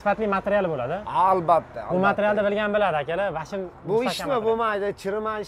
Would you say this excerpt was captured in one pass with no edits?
yes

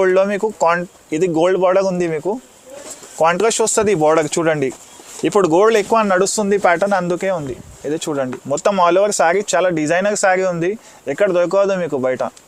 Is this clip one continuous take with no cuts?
yes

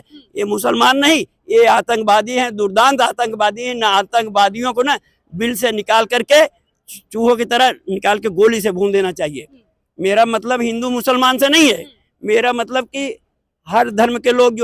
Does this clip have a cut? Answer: no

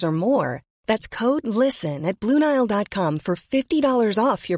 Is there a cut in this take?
no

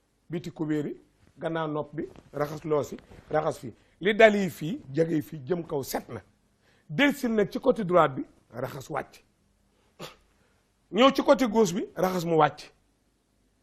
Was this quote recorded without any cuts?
yes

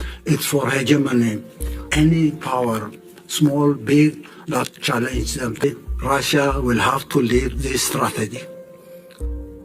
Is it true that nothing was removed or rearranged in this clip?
no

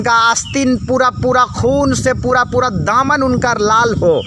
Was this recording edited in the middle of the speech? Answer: no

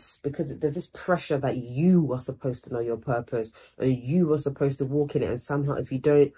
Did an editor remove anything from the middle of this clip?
no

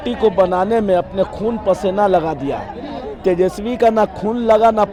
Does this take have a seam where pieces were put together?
no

